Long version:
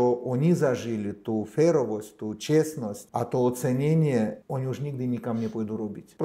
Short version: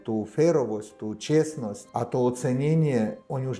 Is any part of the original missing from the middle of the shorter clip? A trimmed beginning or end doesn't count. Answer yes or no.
no